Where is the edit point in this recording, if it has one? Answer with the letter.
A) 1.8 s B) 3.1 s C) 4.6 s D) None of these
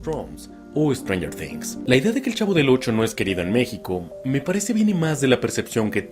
A